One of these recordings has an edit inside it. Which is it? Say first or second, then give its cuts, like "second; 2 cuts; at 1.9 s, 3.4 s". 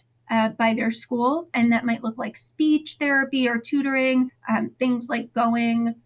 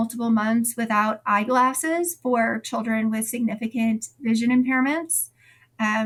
first; 2 cuts; at 1.5 s, 4.4 s